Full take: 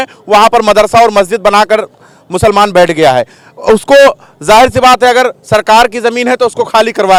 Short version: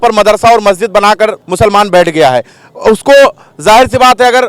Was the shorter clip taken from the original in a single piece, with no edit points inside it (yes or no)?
no